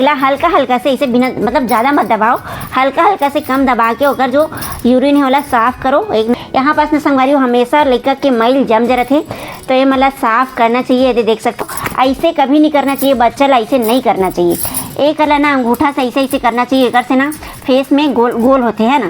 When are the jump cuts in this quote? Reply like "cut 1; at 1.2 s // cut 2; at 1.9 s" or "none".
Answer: cut 1; at 6.4 s // cut 2; at 11.6 s